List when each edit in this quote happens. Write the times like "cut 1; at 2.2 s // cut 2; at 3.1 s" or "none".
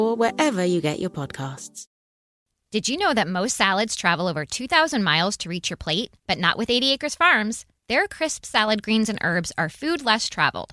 cut 1; at 2.4 s